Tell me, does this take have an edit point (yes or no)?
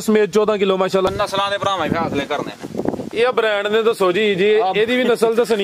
yes